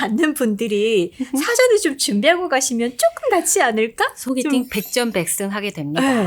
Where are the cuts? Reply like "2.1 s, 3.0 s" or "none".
none